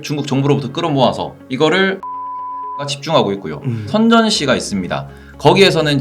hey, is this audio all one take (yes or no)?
no